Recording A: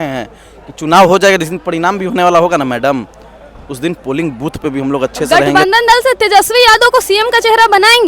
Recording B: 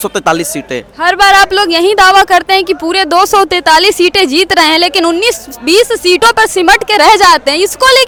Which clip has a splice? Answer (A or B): A